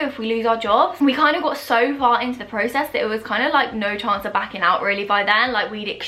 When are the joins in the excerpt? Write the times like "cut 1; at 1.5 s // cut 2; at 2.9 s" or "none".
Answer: none